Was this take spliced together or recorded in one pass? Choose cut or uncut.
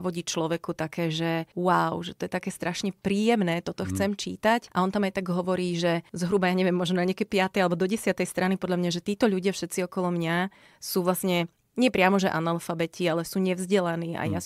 cut